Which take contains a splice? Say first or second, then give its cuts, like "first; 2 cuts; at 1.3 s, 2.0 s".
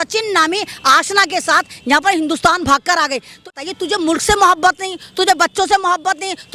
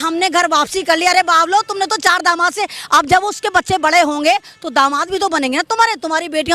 first; 1 cut; at 3.5 s